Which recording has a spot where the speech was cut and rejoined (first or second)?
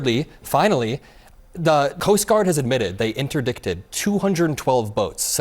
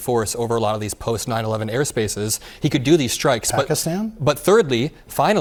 first